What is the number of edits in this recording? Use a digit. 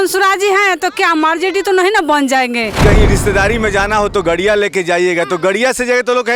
1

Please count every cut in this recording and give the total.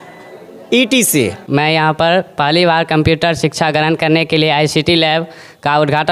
1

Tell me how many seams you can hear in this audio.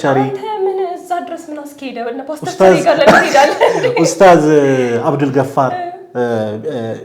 0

